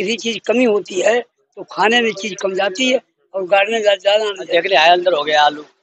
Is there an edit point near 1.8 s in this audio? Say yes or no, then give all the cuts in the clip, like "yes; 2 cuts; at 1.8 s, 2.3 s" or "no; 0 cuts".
no; 1 cut; at 4.5 s